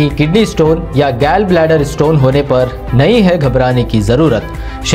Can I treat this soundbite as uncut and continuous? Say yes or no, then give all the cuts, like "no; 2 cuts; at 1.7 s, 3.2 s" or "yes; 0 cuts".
yes; 0 cuts